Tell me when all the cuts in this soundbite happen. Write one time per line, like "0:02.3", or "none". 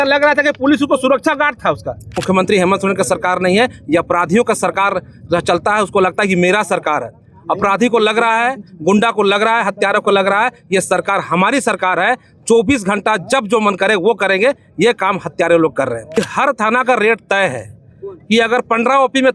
0:02.2
0:16.2